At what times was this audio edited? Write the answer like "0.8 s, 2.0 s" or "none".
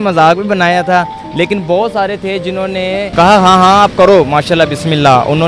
3.1 s